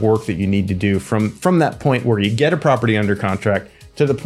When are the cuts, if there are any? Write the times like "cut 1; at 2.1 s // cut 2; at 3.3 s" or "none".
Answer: none

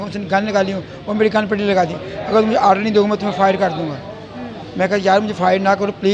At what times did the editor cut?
none

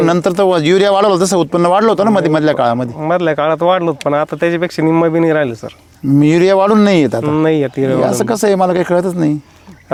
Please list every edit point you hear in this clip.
none

